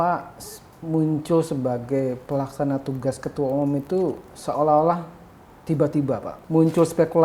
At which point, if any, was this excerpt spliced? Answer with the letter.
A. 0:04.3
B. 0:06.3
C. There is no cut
B